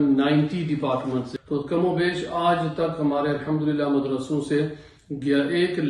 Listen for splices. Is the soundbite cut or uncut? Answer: cut